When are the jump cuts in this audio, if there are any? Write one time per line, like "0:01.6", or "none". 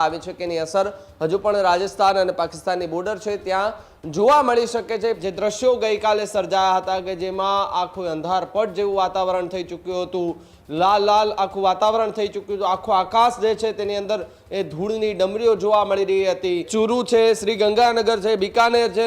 0:05.2
0:16.7